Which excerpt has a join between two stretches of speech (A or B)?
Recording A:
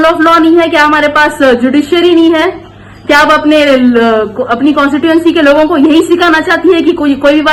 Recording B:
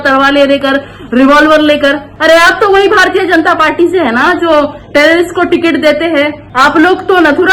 B